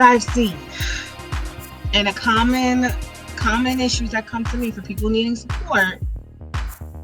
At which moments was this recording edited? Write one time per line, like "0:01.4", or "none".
none